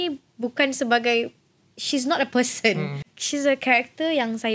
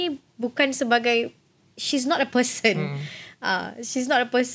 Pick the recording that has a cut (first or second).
first